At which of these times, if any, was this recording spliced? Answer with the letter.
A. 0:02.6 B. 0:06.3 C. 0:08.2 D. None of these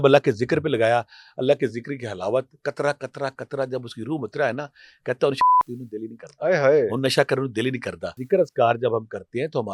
C